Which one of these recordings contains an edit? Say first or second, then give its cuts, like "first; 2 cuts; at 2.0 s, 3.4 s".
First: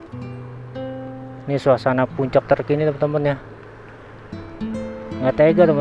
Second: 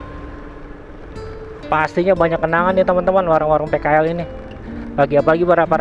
first; 1 cut; at 1.4 s